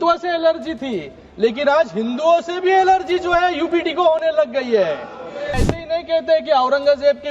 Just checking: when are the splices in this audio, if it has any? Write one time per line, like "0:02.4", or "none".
0:05.5

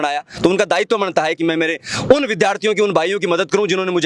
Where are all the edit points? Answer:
0:01.4

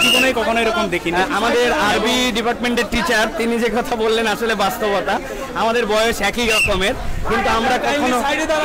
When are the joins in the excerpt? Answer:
none

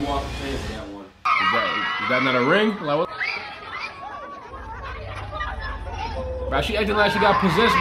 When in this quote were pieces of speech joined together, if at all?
0:01.1

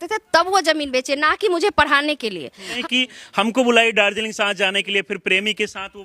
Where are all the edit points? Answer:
0:02.7

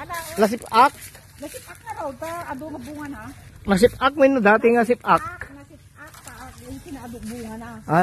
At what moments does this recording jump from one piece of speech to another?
0:03.5

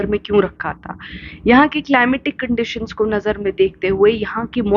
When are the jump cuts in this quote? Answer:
none

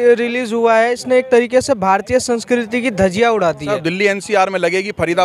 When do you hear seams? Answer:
0:03.7

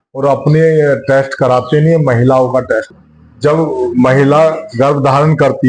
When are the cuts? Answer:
0:02.9

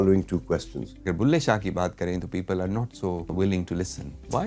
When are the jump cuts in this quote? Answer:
0:01.0
0:03.3

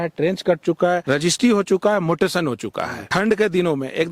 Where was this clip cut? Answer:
0:01.0
0:03.0

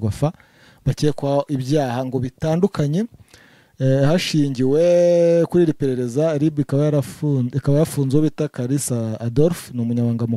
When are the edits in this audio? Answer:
none

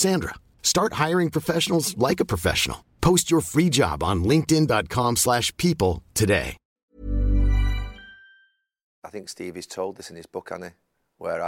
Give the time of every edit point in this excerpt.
0:06.8
0:08.9

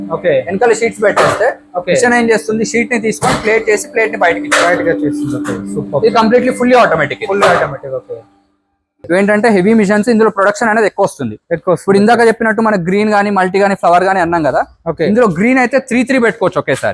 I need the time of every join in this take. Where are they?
0:09.0

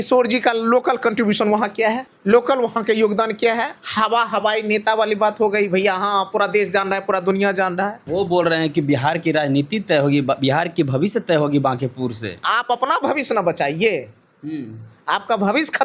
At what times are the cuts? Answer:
0:02.1
0:03.8
0:08.0
0:12.4

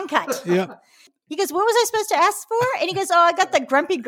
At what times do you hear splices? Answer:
0:01.2

